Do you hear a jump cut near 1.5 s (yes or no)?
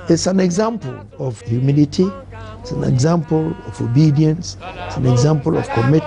yes